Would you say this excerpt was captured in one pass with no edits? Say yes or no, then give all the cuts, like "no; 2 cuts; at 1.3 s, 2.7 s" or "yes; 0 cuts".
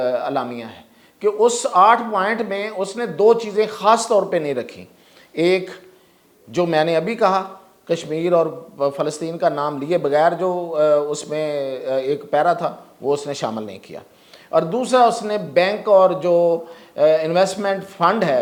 yes; 0 cuts